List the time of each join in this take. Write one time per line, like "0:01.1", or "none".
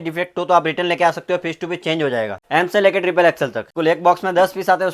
0:02.4
0:03.7